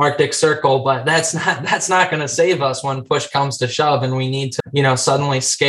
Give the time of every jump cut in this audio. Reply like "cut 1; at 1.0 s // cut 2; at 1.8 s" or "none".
cut 1; at 4.5 s